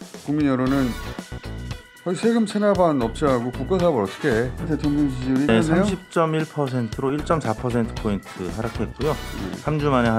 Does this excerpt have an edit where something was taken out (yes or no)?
yes